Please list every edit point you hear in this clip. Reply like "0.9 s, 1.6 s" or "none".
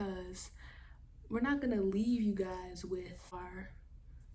3.3 s